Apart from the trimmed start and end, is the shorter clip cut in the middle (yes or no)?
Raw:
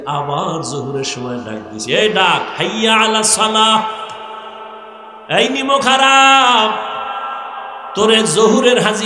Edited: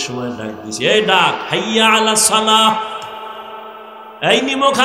no